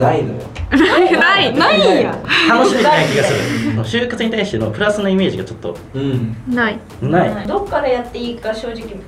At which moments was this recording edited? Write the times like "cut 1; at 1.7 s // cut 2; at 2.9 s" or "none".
cut 1; at 2.2 s // cut 2; at 3.8 s // cut 3; at 7.5 s